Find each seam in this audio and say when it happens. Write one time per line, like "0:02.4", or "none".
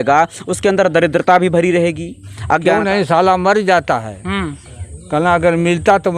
0:02.7